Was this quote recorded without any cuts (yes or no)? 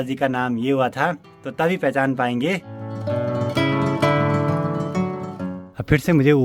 yes